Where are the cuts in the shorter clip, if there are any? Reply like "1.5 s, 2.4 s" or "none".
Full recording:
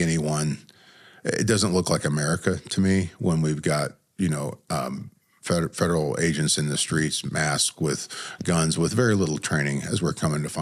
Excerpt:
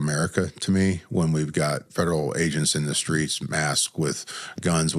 1.9 s